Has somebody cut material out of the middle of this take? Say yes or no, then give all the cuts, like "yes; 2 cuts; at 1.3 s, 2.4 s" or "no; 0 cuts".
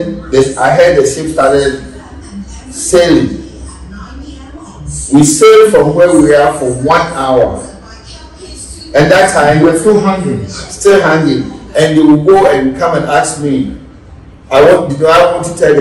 no; 0 cuts